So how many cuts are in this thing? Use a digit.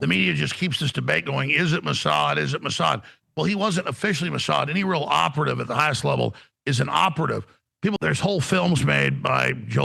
1